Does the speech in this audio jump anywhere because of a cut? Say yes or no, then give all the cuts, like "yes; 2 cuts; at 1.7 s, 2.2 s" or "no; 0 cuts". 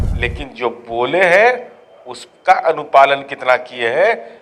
no; 0 cuts